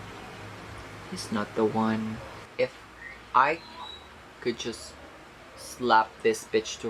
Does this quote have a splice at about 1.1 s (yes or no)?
no